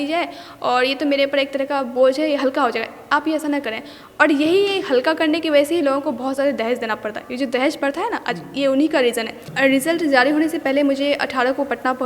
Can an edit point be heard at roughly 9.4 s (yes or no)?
yes